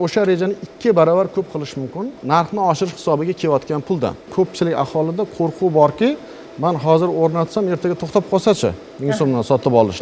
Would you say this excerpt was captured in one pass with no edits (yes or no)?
no